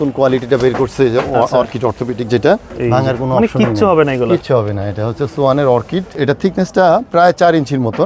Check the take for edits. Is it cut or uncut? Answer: cut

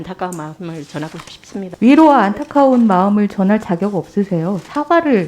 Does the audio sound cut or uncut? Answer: cut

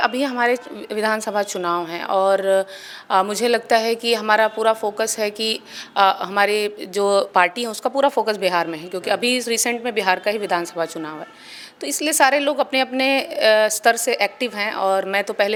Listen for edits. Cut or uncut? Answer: uncut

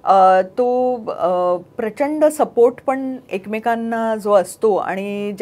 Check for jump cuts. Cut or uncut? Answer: uncut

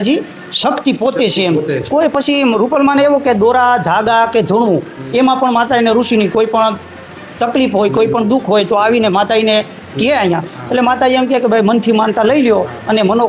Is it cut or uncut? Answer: uncut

